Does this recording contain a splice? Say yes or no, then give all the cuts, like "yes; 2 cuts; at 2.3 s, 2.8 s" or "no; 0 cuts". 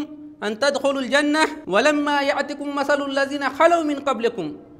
yes; 1 cut; at 1.6 s